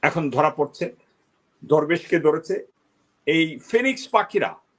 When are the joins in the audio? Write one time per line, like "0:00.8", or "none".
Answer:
0:02.7